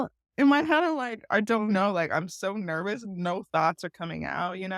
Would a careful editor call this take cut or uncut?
uncut